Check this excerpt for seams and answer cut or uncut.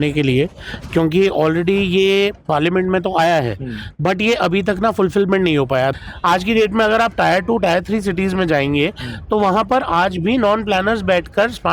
cut